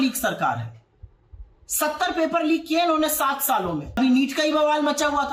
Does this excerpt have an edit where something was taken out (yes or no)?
yes